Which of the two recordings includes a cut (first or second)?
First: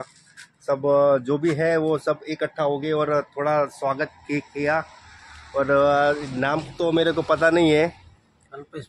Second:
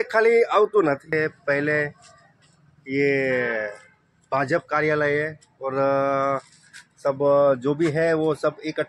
second